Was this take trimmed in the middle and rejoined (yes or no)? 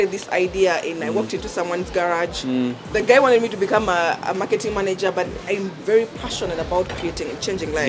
yes